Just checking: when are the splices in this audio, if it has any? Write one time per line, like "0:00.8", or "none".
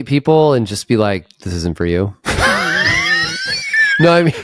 none